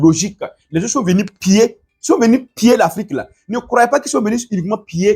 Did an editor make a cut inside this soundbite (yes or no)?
no